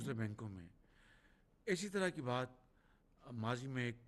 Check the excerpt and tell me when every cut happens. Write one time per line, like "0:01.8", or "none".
none